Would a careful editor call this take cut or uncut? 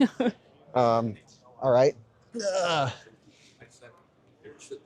uncut